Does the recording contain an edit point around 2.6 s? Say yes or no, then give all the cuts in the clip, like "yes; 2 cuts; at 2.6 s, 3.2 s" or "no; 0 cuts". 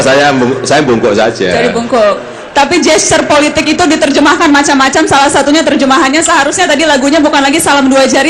yes; 1 cut; at 2.6 s